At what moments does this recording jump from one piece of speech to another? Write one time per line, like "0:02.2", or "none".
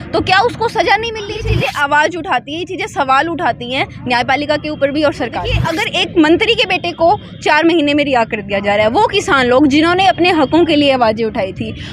0:01.5
0:05.7